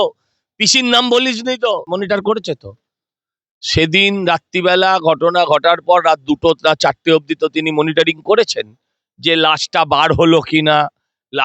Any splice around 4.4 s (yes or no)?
no